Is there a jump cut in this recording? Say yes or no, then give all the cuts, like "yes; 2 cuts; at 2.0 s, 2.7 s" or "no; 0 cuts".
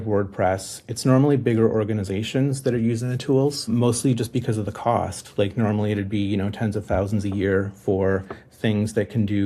yes; 1 cut; at 3.7 s